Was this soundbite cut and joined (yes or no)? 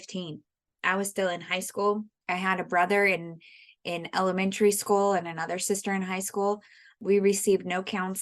yes